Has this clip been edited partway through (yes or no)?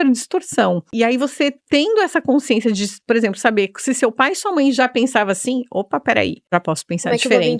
yes